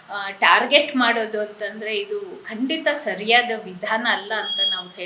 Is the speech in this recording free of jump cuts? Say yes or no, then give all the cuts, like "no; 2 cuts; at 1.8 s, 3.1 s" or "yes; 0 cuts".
yes; 0 cuts